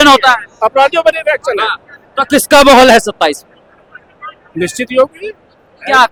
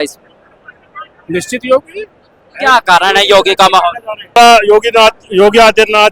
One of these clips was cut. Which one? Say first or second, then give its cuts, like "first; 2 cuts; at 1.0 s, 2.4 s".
second; 1 cut; at 4.3 s